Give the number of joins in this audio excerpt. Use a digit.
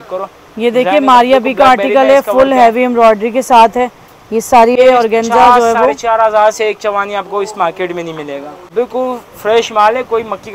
2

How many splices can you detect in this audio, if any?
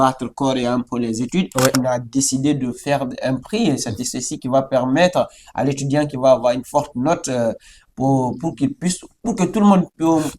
1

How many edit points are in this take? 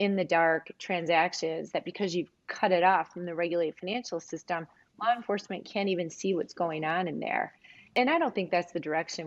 1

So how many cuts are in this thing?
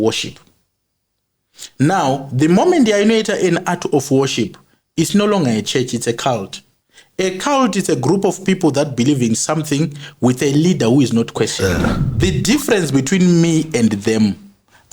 1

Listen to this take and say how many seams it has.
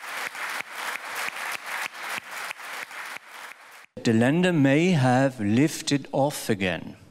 1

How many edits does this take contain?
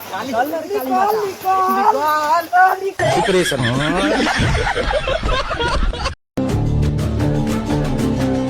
1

